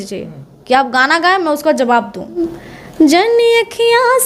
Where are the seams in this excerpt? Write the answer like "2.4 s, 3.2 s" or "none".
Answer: 2.4 s